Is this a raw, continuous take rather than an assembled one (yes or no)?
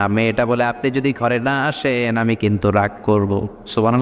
yes